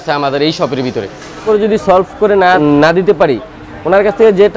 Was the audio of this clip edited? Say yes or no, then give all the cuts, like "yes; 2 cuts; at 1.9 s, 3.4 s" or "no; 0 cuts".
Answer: yes; 2 cuts; at 1.4 s, 2.6 s